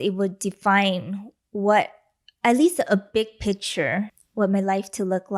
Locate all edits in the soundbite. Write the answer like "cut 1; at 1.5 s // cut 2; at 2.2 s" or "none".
cut 1; at 4.2 s